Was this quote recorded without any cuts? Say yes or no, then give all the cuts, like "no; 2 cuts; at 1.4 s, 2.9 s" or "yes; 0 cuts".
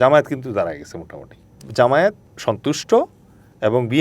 no; 2 cuts; at 1.6 s, 2.3 s